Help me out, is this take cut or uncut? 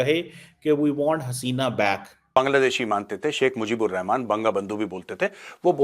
cut